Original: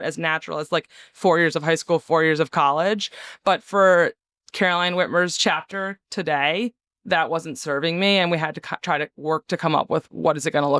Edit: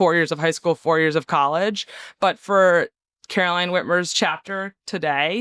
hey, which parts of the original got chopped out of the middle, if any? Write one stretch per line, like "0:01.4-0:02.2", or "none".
none